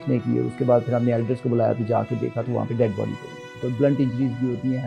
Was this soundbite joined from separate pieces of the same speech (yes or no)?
yes